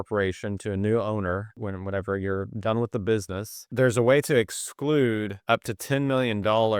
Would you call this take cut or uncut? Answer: cut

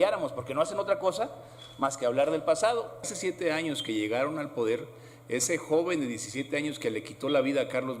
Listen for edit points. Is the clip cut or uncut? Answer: cut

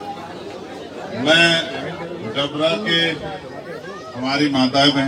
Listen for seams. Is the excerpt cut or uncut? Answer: cut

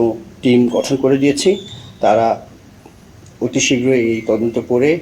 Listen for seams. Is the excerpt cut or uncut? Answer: uncut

